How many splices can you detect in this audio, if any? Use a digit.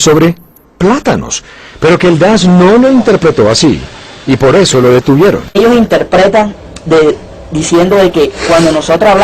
0